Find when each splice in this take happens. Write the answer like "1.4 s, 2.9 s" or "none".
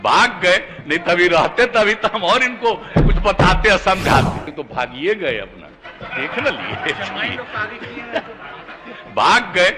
4.5 s